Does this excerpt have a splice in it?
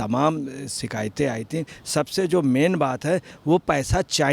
yes; 1 cut; at 1.8 s

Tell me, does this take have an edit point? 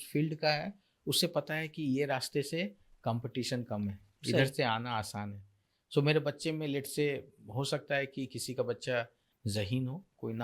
yes; 1 cut; at 9.3 s

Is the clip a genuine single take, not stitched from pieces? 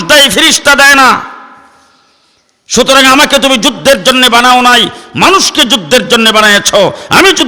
yes; 0 cuts

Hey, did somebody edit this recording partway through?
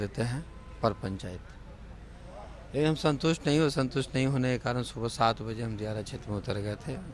no; 0 cuts

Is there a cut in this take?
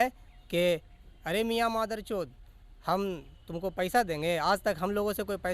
no; 0 cuts

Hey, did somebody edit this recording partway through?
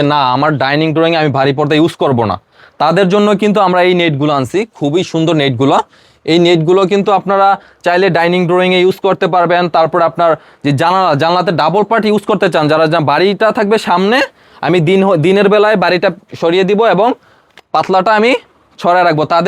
no; 0 cuts

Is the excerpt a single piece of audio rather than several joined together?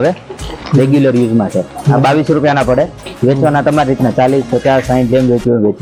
yes; 0 cuts

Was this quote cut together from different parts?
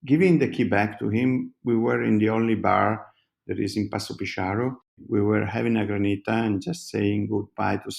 yes; 1 cut; at 5.0 s

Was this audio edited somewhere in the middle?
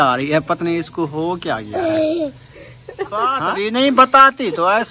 yes; 1 cut; at 3.4 s

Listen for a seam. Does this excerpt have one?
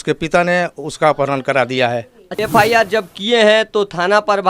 yes; 1 cut; at 2.4 s

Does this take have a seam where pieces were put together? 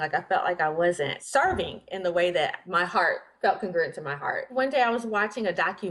yes; 3 cuts; at 1.2 s, 2.6 s, 4.5 s

